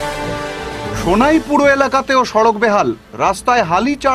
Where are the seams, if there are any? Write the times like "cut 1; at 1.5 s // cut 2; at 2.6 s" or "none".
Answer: cut 1; at 0.9 s

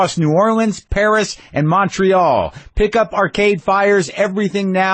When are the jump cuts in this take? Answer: none

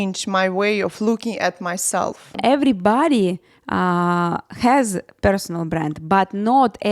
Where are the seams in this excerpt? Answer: cut 1; at 2.3 s

